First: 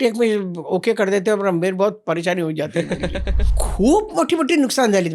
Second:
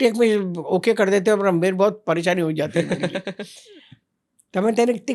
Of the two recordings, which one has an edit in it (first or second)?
first